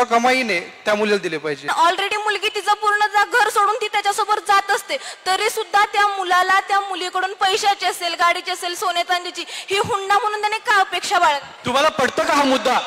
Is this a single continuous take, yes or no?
no